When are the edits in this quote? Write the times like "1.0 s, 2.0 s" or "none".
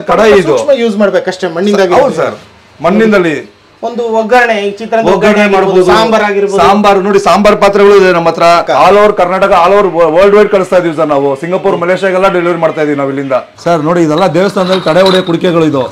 8.7 s